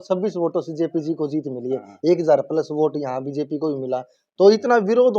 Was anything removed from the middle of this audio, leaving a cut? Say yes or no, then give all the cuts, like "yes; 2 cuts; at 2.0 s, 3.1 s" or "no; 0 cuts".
no; 0 cuts